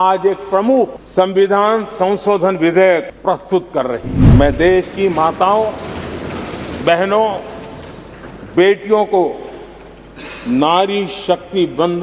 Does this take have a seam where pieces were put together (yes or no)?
yes